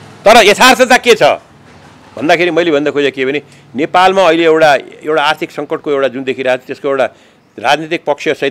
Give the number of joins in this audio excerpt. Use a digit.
0